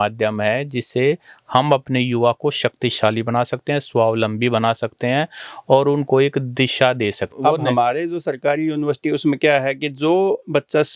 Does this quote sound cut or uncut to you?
cut